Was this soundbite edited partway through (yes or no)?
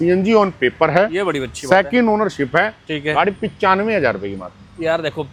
no